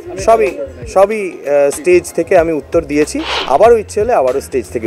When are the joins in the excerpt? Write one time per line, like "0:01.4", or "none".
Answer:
0:03.3